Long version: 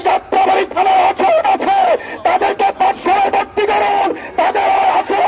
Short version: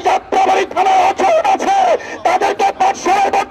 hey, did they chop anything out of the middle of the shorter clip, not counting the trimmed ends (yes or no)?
no